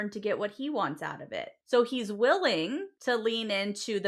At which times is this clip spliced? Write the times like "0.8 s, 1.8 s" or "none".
1.5 s, 2.9 s